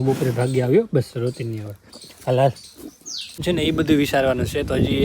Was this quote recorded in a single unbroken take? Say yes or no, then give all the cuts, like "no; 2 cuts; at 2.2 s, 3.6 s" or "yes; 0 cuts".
no; 1 cut; at 3.4 s